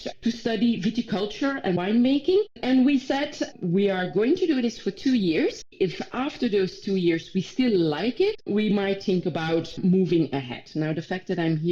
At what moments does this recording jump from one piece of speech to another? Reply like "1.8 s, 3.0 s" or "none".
5.7 s, 8.4 s, 9.8 s